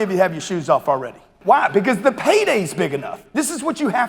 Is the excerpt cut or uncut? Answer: cut